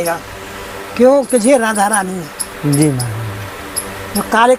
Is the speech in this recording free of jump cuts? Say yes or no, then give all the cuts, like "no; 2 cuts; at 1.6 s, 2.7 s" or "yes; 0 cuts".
yes; 0 cuts